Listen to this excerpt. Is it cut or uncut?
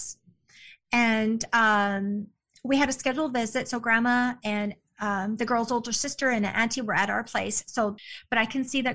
cut